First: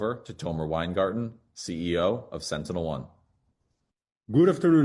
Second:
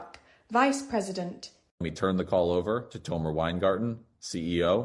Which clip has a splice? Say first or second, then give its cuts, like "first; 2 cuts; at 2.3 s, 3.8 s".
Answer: second; 1 cut; at 1.6 s